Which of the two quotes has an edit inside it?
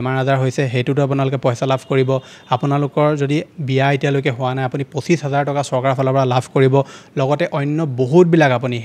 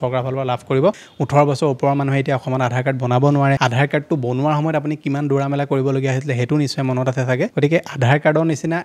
second; 3 cuts; at 1.1 s, 3.6 s, 7.5 s

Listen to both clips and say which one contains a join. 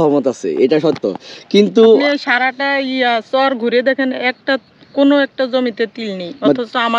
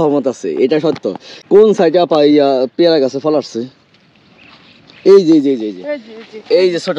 second; 1 cut; at 1.0 s

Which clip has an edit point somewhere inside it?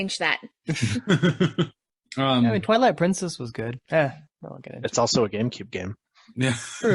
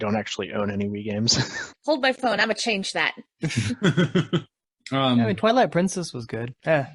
second; 1 cut; at 1.7 s

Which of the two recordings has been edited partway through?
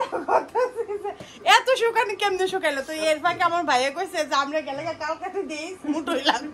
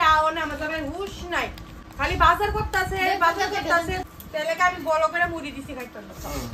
second; 1 cut; at 4.1 s

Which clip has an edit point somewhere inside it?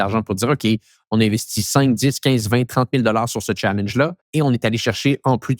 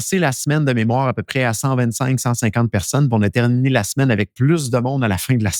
first; 1 cut; at 4.2 s

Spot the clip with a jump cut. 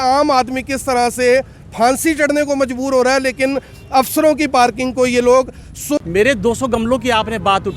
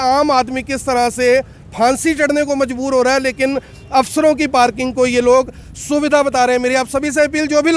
first; 1 cut; at 6.0 s

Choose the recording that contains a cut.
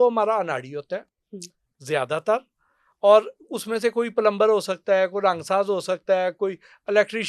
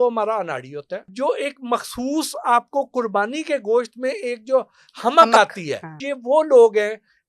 second; 2 cuts; at 1.1 s, 6.1 s

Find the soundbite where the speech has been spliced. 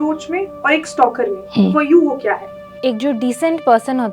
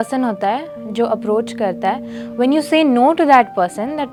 first; 1 cut; at 2.7 s

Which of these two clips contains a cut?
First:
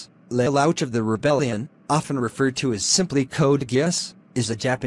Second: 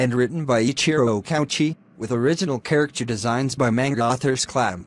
first; 1 cut; at 1.1 s

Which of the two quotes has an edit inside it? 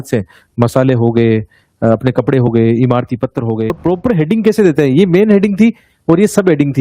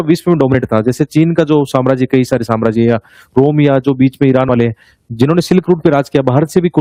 first; 1 cut; at 3.7 s

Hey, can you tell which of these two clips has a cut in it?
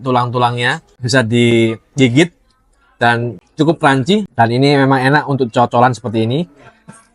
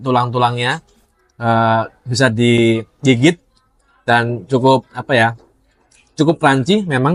first; 3 cuts; at 0.9 s, 3.3 s, 4.3 s

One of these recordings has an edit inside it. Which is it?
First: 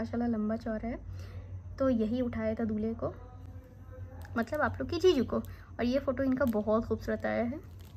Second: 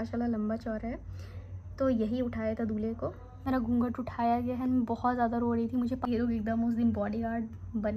second; 2 cuts; at 3.5 s, 6.1 s

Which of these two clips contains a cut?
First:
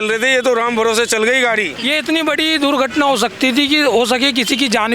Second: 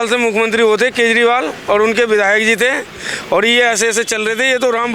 first; 1 cut; at 1.7 s

